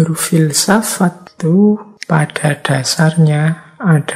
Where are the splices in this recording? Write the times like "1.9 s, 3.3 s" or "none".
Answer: 1.3 s, 1.9 s